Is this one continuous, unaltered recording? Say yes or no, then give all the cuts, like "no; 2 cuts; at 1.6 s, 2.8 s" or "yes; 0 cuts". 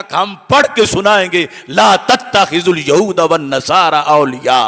yes; 0 cuts